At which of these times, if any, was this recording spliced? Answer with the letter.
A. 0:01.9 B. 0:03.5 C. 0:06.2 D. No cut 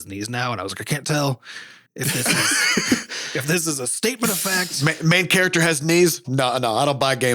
C